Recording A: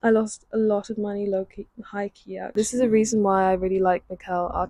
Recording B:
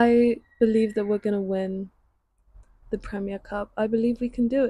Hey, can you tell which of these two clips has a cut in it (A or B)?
A